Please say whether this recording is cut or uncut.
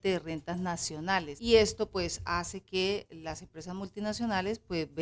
cut